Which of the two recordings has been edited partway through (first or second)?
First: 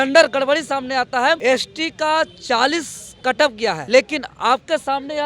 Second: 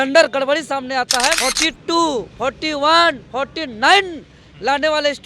second